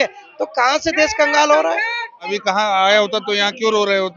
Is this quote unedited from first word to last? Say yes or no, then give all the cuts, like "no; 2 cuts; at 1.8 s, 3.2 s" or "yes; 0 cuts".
no; 1 cut; at 2.3 s